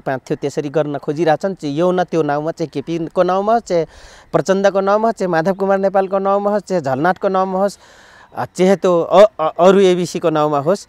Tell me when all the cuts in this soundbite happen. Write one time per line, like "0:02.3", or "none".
none